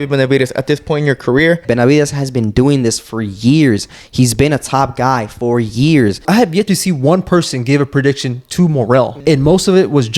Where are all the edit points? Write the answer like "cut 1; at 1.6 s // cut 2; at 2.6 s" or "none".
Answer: cut 1; at 1.6 s // cut 2; at 6.2 s // cut 3; at 9.1 s